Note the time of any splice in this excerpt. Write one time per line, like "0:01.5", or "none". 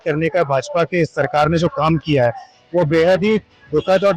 none